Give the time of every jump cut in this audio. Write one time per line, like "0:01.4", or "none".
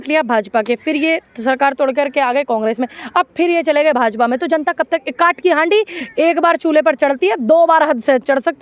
none